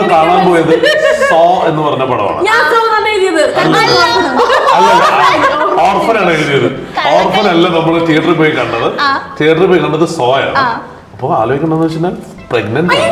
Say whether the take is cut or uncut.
uncut